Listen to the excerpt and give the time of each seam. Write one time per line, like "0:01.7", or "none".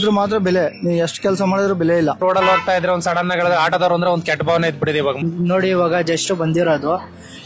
0:02.2
0:05.2